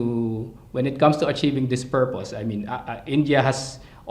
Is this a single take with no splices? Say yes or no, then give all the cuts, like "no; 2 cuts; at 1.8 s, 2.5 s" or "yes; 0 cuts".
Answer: yes; 0 cuts